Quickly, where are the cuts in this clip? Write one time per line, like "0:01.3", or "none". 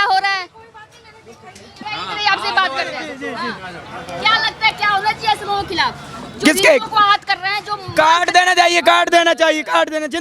0:01.7